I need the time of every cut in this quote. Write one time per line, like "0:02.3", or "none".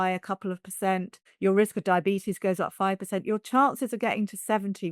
0:01.2

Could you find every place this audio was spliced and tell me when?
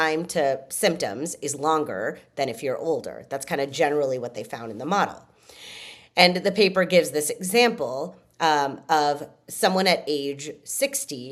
none

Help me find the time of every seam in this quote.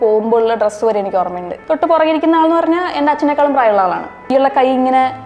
0:01.5
0:04.3

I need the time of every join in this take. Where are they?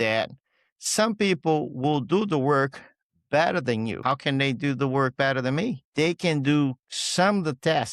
0:04.0
0:05.8

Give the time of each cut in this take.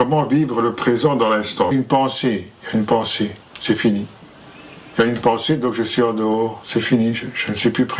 0:01.7

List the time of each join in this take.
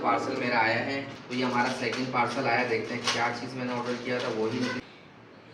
0:01.1
0:04.8

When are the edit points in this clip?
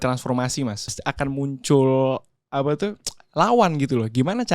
0:01.0

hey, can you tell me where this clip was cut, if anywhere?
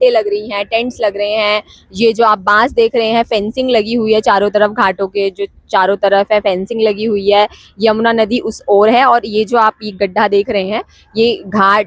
none

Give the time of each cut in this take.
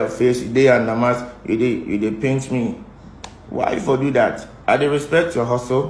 0:04.5

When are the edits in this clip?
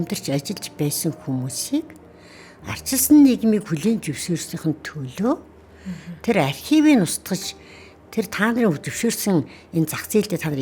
none

